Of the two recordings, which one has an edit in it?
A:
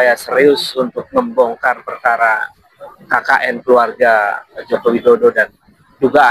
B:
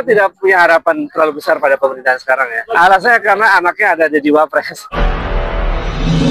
B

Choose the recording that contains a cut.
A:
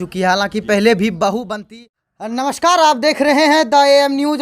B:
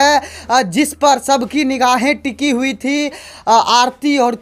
A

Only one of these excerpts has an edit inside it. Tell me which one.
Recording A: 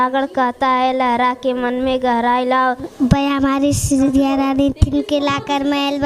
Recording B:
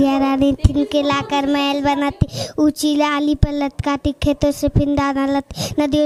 A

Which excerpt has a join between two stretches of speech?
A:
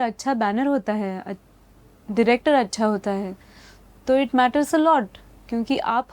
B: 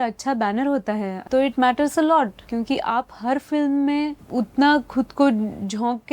B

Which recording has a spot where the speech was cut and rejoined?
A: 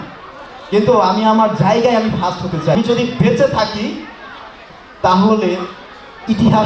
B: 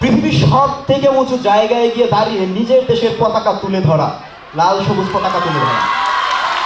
A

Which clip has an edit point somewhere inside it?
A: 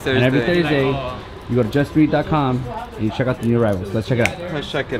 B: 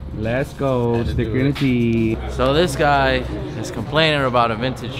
B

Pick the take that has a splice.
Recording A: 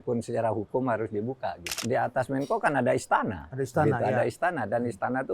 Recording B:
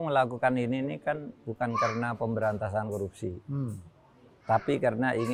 A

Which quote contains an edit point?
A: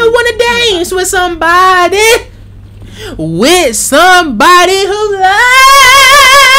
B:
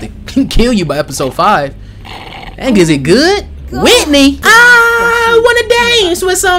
B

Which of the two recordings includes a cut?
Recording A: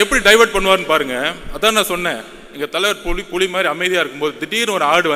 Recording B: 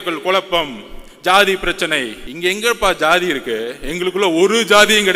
B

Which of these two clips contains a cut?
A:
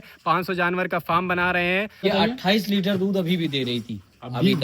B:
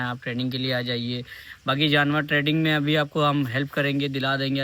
A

